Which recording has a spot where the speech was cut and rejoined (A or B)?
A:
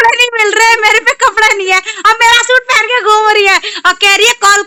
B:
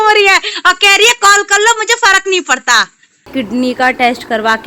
B